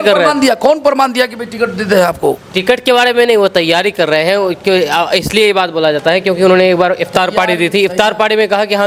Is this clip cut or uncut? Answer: uncut